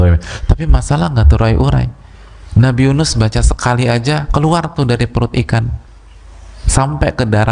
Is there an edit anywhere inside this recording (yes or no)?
no